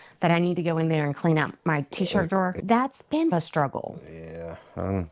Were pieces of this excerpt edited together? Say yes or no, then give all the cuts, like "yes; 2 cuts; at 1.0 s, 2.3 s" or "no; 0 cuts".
yes; 1 cut; at 2.6 s